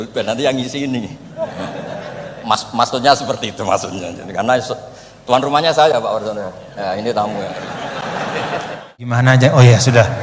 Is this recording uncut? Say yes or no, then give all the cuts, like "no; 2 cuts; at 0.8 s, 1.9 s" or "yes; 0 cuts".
no; 1 cut; at 9.2 s